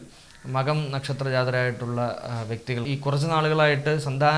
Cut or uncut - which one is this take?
cut